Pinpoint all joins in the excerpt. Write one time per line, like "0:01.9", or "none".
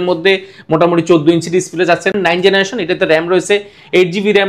0:02.1